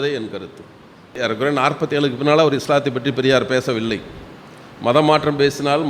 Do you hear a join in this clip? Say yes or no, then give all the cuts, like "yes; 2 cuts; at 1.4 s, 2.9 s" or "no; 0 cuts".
yes; 1 cut; at 1.1 s